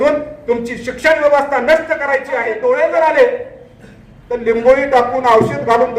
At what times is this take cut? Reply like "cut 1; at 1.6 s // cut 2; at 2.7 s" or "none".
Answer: cut 1; at 2.5 s